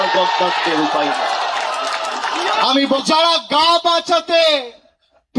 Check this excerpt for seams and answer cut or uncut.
cut